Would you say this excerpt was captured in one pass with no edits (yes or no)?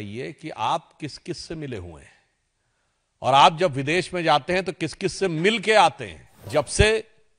no